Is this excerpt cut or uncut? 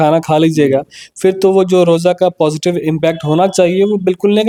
uncut